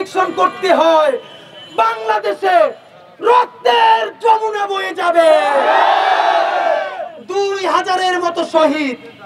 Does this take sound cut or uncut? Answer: uncut